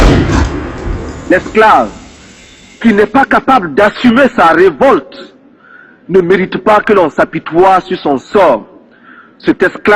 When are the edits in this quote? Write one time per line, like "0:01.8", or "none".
0:01.3

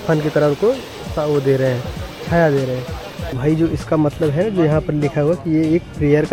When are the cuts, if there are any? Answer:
0:03.4

